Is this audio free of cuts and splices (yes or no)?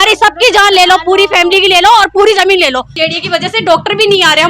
no